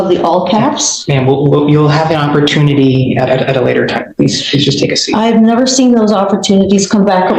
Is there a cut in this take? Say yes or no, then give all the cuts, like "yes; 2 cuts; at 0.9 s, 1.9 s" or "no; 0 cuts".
no; 0 cuts